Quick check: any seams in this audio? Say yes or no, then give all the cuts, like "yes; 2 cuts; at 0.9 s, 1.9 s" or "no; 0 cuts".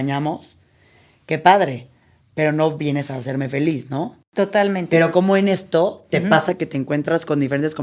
no; 0 cuts